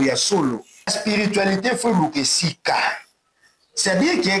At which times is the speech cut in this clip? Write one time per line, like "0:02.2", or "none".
0:00.9